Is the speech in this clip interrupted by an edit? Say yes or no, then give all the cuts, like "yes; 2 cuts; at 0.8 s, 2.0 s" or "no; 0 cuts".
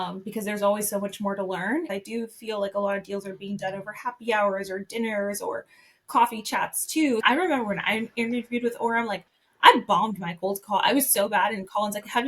yes; 2 cuts; at 1.9 s, 7.2 s